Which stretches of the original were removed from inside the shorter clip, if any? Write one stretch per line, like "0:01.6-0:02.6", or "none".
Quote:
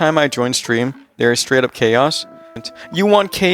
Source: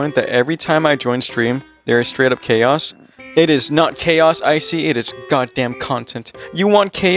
0:03.2-0:06.1